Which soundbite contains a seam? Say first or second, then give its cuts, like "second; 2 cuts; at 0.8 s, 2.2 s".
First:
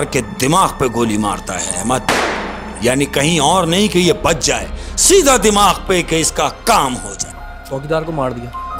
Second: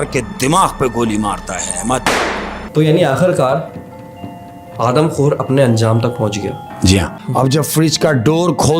second; 2 cuts; at 2.0 s, 7.2 s